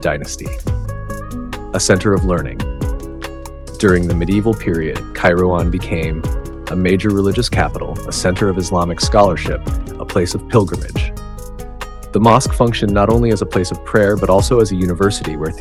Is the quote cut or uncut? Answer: uncut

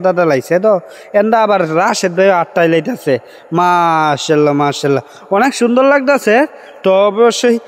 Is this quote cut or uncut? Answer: uncut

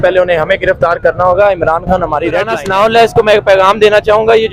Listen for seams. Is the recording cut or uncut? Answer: cut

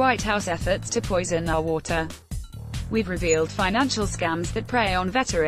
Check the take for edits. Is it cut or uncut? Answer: uncut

